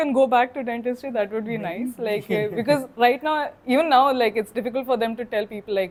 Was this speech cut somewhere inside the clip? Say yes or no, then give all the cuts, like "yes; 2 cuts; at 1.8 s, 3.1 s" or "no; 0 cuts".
no; 0 cuts